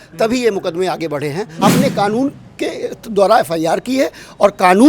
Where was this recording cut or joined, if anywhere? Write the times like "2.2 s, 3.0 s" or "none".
1.6 s